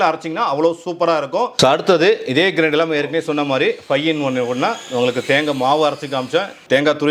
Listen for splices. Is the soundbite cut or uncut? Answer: uncut